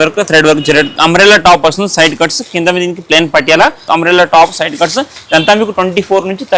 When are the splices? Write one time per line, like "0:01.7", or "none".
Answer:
0:00.9
0:03.8